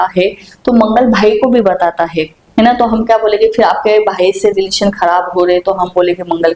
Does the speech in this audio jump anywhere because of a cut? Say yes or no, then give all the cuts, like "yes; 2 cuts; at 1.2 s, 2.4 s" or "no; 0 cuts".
no; 0 cuts